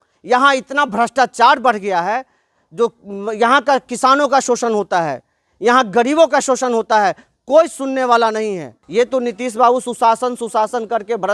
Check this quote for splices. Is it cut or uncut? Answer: cut